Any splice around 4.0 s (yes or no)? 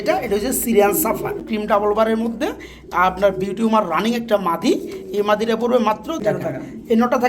no